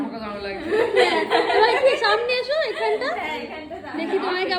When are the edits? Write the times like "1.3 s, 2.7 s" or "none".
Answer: none